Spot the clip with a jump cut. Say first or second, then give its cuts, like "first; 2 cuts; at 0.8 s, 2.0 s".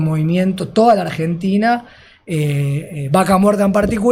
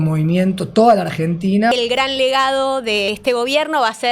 second; 2 cuts; at 1.7 s, 3.1 s